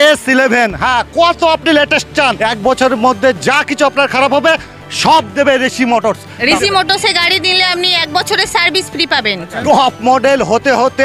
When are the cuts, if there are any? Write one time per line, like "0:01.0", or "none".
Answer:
0:02.4
0:06.3
0:09.6